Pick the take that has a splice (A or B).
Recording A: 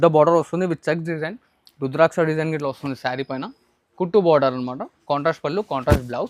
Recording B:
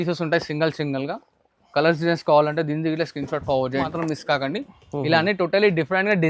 B